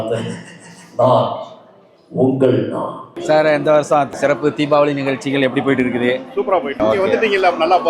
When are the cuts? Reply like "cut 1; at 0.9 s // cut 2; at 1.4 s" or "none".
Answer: cut 1; at 3.1 s // cut 2; at 4.1 s // cut 3; at 6.8 s